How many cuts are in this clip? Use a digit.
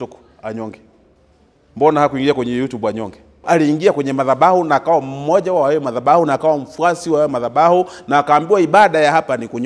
1